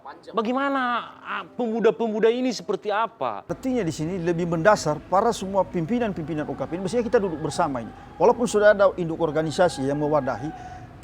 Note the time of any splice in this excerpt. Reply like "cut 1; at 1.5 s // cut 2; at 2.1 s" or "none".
cut 1; at 3.6 s

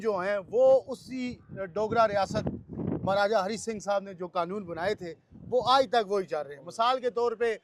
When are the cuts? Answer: none

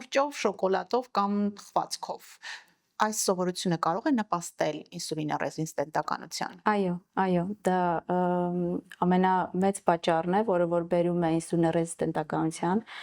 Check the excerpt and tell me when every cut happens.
none

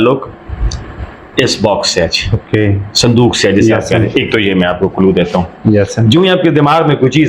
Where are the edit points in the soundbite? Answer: none

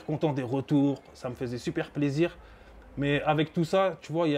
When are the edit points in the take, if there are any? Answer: none

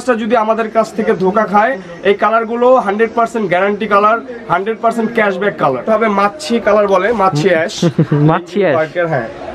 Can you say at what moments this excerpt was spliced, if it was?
cut 1; at 5.8 s

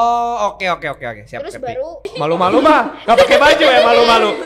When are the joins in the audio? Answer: cut 1; at 2.1 s

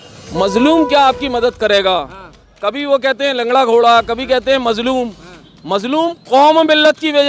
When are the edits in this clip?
none

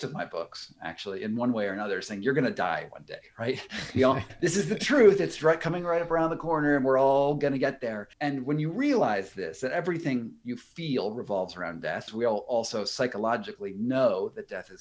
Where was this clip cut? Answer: cut 1; at 4.3 s // cut 2; at 8.1 s // cut 3; at 12.0 s

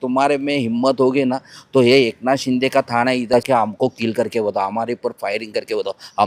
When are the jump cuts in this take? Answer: cut 1; at 3.3 s

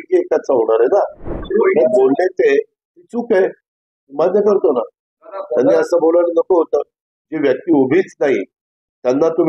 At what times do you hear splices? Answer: cut 1; at 1.4 s

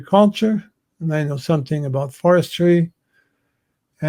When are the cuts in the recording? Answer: none

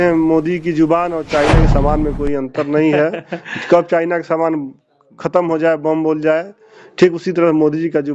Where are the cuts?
none

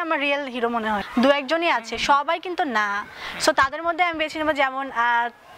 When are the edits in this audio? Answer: cut 1; at 1.0 s

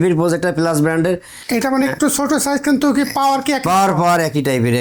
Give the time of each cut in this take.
none

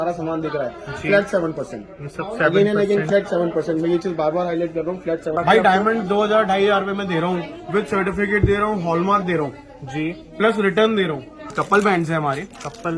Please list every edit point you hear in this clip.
cut 1; at 5.3 s // cut 2; at 11.5 s

